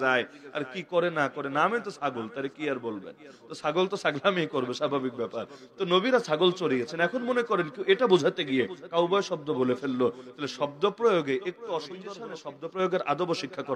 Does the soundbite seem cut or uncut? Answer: cut